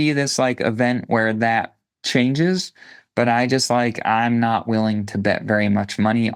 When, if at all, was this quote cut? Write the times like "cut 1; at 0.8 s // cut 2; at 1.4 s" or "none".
none